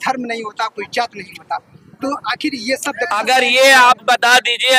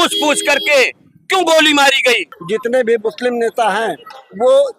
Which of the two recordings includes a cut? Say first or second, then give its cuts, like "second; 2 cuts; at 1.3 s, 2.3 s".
second; 1 cut; at 2.3 s